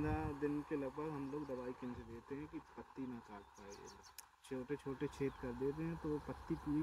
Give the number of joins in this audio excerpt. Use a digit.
0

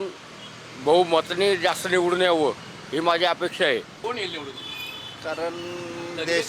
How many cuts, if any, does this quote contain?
1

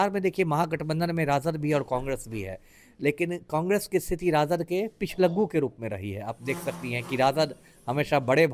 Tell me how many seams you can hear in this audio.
0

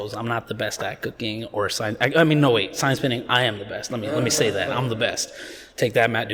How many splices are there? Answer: 0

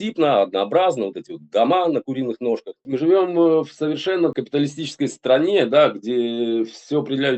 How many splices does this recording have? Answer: 2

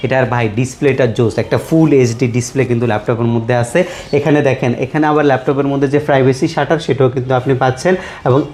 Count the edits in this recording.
0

